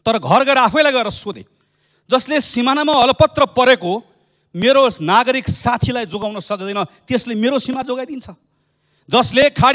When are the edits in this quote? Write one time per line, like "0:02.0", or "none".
none

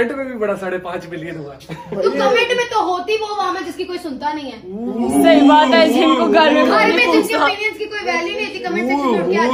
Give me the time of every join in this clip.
none

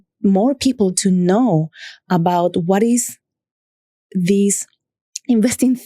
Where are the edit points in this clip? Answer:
0:01.0

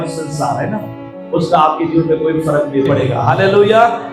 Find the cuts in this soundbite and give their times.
0:03.0

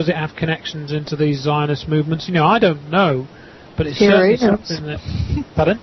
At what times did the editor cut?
none

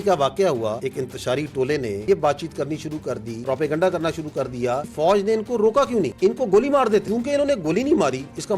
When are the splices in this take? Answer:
0:00.8
0:02.0
0:03.3
0:04.9
0:06.1
0:07.0

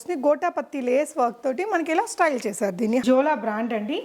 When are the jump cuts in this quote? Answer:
0:03.0

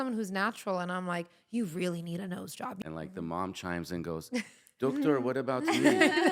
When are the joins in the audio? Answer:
0:02.8

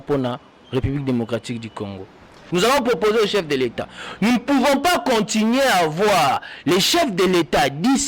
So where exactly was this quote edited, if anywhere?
0:02.4

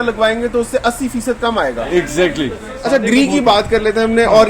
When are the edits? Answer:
0:02.7

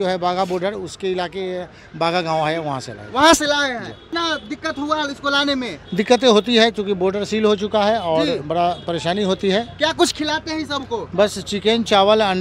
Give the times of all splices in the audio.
0:04.0

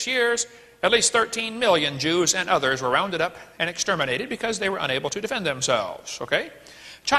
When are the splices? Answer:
0:01.4

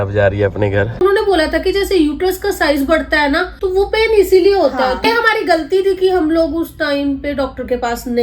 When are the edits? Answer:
0:01.0
0:05.0

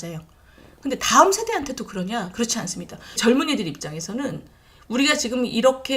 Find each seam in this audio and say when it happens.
0:03.2

